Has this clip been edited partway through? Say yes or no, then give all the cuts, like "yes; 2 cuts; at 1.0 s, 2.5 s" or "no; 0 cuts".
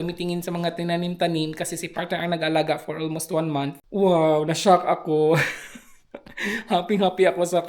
no; 0 cuts